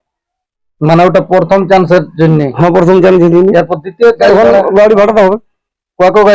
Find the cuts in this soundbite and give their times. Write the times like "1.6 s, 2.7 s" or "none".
4.2 s